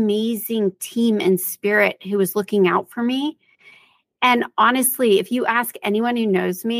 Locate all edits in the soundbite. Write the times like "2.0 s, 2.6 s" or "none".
none